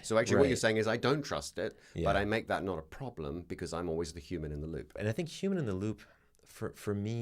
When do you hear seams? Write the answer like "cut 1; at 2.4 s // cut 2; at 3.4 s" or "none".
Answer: cut 1; at 4.9 s